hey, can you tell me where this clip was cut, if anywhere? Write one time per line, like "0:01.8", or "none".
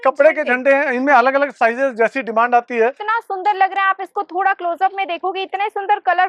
0:03.0